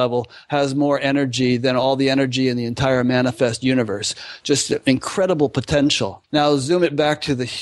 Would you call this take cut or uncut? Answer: cut